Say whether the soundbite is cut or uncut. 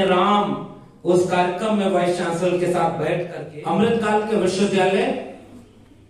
cut